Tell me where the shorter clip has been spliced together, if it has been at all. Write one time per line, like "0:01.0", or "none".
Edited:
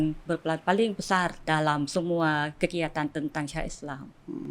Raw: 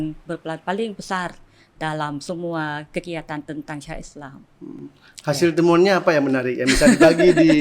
0:01.4